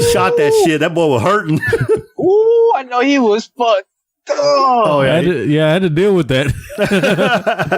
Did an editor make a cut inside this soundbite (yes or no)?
no